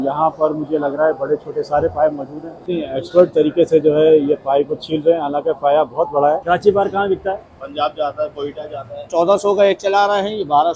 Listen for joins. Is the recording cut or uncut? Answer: cut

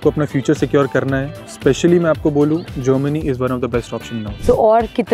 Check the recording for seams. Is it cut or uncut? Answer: cut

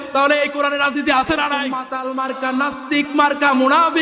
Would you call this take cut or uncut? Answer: cut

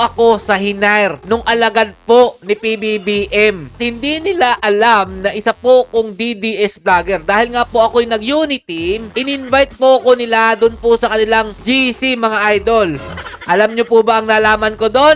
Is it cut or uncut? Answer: cut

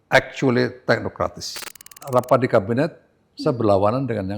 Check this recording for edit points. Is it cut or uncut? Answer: cut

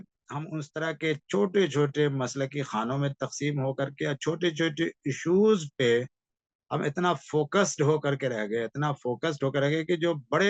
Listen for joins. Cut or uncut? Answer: uncut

